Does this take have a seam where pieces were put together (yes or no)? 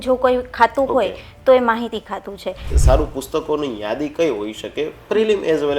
yes